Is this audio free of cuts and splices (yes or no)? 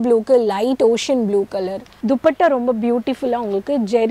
no